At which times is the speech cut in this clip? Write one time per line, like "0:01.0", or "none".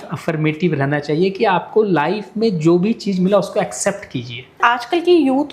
0:04.6